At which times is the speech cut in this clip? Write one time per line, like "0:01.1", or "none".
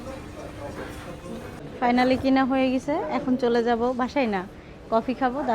0:01.6